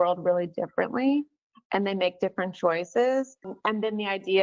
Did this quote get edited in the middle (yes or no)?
yes